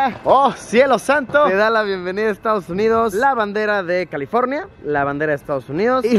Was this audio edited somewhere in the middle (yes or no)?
yes